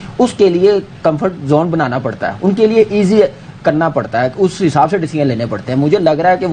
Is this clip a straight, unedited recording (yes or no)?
yes